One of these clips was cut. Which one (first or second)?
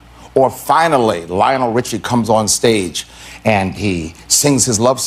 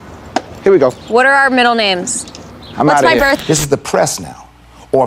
second